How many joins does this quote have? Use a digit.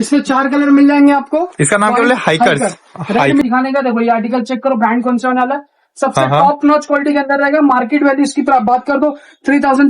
1